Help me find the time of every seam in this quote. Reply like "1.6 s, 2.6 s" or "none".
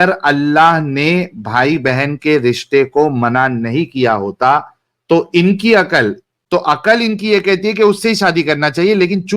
6.3 s